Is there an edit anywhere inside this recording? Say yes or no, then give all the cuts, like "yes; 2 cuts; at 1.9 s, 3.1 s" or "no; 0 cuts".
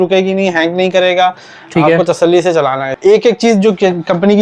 yes; 1 cut; at 2.9 s